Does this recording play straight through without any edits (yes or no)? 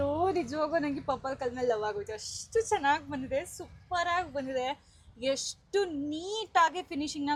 yes